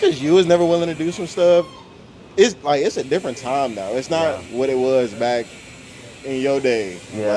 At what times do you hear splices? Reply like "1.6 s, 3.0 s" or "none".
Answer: none